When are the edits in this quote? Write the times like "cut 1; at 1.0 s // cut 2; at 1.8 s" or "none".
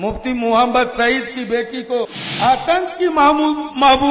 cut 1; at 2.2 s